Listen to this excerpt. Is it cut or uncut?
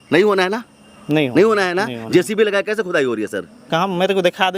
uncut